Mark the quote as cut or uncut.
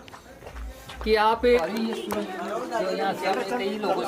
cut